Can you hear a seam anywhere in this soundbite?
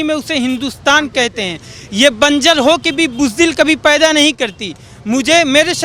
no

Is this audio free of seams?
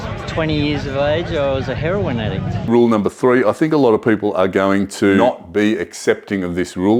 no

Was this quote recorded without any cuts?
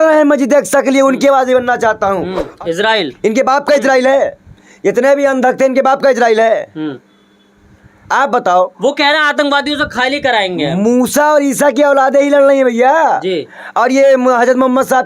no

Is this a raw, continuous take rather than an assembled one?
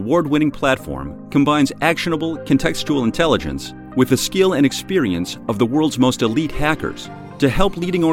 yes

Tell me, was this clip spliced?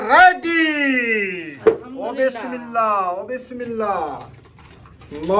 yes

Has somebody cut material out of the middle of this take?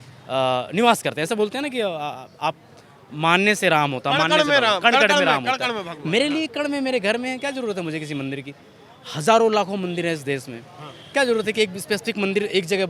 no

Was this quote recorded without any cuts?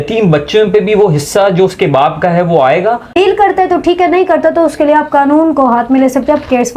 no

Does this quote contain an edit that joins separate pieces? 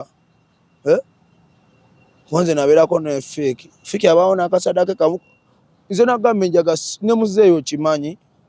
no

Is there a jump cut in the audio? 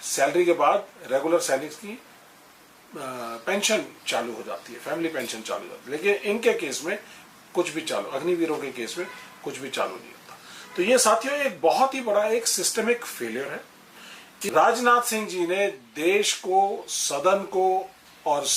yes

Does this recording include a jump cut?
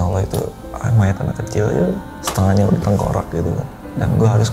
yes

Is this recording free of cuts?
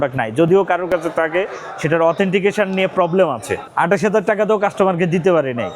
no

